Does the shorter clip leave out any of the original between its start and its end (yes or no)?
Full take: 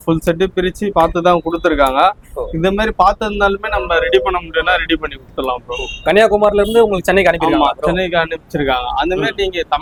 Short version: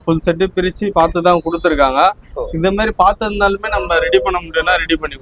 no